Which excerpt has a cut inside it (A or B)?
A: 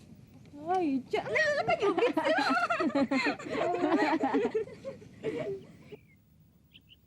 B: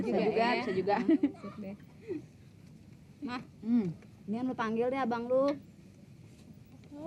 A